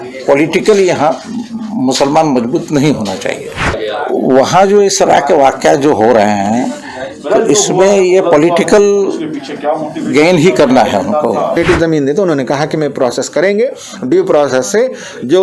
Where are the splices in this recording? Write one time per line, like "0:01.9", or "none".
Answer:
0:03.8
0:11.6